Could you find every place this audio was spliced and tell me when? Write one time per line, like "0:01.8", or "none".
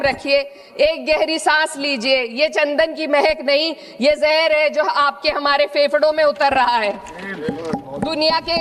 none